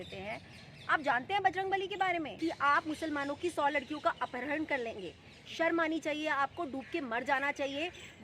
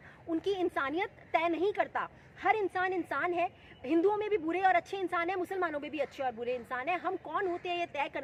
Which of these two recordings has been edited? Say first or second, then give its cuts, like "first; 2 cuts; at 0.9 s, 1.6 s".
first; 1 cut; at 2.3 s